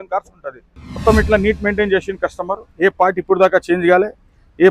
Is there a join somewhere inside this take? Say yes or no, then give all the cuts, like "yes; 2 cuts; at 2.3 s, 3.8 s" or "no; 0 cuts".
yes; 1 cut; at 0.9 s